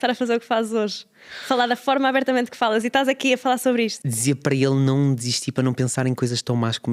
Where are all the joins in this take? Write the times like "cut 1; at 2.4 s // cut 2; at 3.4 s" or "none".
cut 1; at 4.1 s